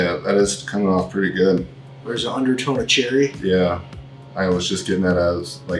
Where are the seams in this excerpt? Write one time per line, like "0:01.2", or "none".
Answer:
none